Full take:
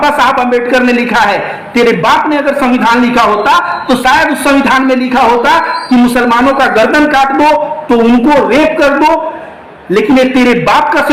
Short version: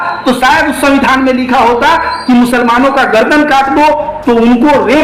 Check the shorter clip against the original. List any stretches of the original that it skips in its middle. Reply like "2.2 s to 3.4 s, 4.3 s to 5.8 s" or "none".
none